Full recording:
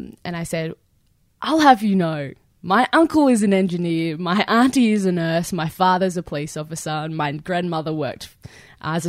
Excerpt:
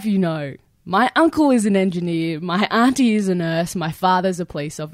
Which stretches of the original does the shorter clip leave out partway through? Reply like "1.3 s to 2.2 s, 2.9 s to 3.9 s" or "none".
none